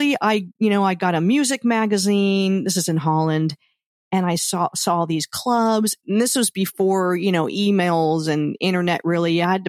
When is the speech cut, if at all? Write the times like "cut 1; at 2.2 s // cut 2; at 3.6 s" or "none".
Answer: cut 1; at 6.0 s